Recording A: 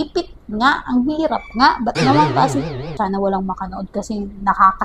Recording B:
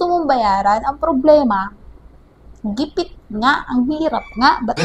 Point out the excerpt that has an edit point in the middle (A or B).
A